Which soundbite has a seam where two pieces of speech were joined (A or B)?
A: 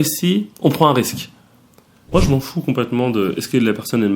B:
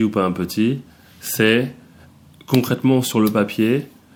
A